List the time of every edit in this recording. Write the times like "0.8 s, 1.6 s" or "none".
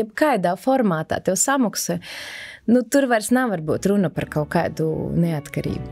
none